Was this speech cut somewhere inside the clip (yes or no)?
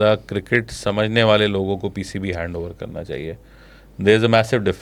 no